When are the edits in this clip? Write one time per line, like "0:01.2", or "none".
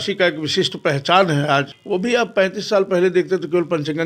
0:01.8